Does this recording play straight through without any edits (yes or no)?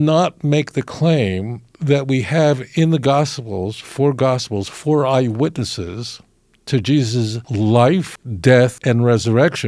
no